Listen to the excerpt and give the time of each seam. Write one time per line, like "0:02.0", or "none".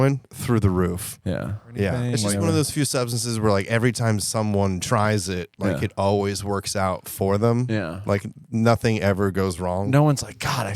0:02.0